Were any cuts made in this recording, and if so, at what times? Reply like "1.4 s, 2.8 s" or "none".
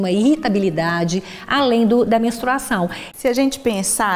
3.0 s